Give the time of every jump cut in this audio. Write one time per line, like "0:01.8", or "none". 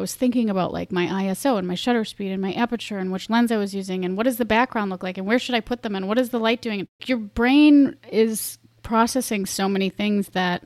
0:07.0